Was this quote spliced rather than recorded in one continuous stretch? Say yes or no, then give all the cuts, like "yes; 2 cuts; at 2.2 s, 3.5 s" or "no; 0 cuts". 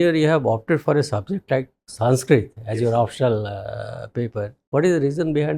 yes; 1 cut; at 4.6 s